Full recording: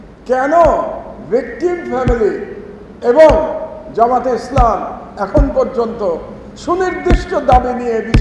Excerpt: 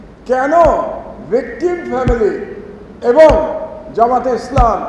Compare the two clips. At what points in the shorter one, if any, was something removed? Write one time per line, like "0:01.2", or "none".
none